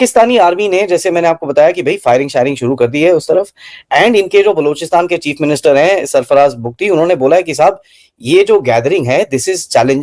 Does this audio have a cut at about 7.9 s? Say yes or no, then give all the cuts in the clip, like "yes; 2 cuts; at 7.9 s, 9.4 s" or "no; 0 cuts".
no; 0 cuts